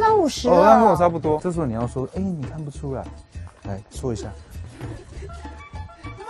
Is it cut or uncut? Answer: cut